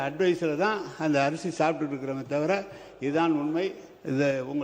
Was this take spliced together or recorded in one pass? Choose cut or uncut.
uncut